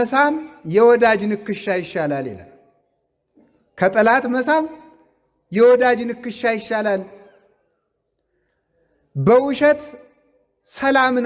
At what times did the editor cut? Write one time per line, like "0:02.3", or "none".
none